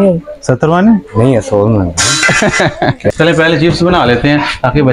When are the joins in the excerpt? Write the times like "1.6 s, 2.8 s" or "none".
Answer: 3.1 s